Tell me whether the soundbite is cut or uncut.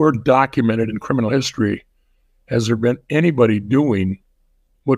uncut